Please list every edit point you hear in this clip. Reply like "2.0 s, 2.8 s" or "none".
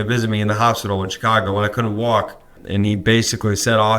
2.6 s